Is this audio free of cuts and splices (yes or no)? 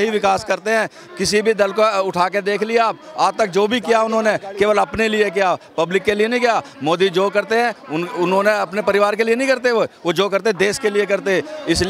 yes